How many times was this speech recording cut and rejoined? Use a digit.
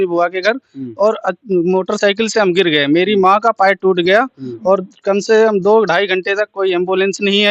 0